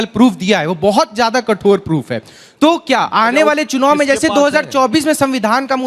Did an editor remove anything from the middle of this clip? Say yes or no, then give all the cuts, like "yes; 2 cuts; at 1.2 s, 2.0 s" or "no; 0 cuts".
no; 0 cuts